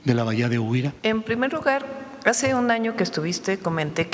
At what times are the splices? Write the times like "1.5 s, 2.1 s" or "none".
1.0 s